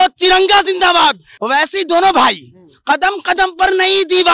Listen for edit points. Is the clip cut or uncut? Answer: cut